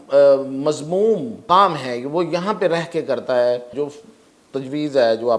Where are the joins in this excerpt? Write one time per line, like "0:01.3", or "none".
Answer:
0:01.4
0:03.7